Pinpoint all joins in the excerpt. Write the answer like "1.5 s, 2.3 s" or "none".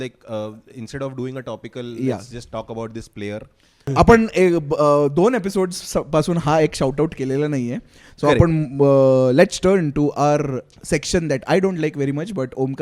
3.9 s